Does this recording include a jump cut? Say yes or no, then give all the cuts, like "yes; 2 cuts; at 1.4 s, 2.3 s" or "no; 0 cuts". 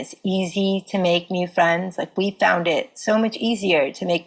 no; 0 cuts